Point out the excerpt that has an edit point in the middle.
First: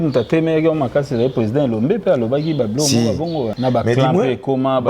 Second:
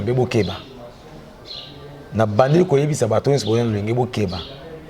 first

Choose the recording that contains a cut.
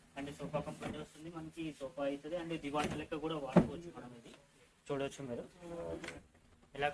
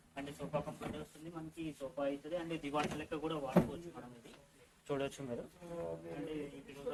first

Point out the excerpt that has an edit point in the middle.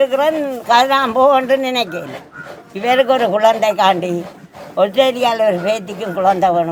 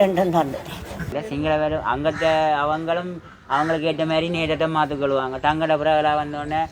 second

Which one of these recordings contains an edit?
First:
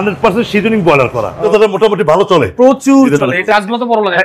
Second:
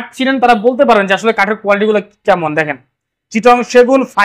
first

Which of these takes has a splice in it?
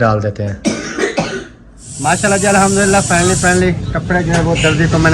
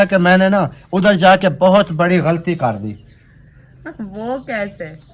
first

